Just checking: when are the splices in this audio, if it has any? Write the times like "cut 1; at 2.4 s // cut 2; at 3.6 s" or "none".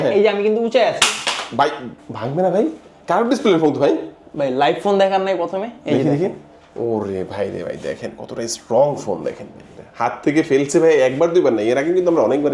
none

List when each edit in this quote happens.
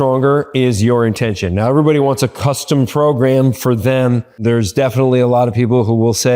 cut 1; at 4.4 s

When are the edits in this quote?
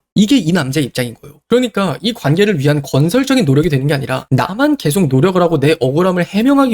cut 1; at 1.3 s

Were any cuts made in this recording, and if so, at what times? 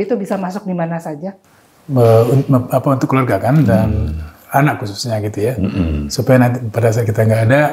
cut 1; at 1.3 s

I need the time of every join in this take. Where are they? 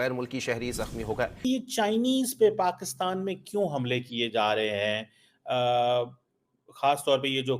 cut 1; at 1.7 s

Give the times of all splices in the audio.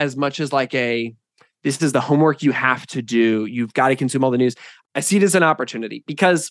none

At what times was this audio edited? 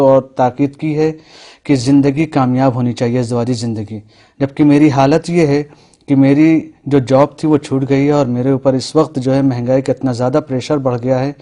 cut 1; at 6.8 s

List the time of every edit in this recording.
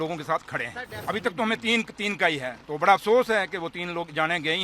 cut 1; at 0.9 s

